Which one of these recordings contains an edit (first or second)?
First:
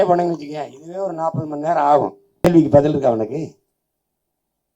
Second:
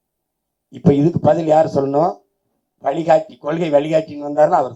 first